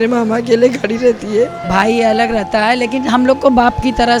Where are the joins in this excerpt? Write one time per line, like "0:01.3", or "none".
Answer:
0:01.6